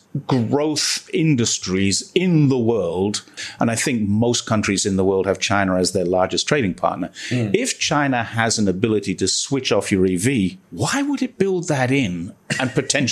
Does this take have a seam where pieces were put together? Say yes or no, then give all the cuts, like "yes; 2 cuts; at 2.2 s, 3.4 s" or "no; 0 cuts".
yes; 1 cut; at 3.4 s